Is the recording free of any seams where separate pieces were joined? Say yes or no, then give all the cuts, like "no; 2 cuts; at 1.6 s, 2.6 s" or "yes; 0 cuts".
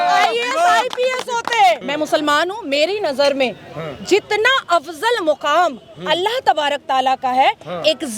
no; 1 cut; at 1.9 s